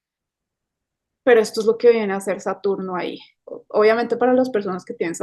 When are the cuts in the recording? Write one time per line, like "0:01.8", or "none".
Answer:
0:03.5